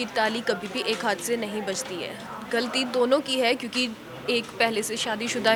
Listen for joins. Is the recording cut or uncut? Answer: uncut